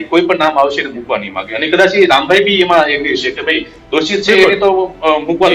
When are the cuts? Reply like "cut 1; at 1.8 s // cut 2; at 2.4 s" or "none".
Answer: none